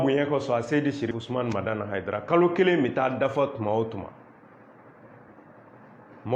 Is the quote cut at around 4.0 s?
no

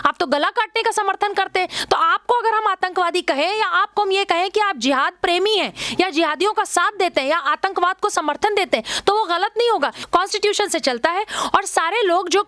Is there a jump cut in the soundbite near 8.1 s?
no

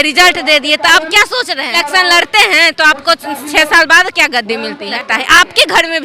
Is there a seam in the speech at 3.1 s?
no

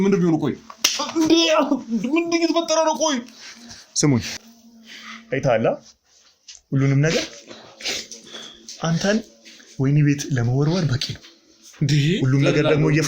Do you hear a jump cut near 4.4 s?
yes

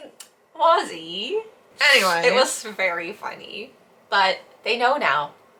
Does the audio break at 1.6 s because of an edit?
no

